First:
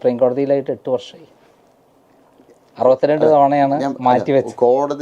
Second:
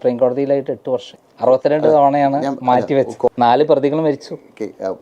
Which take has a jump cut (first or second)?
second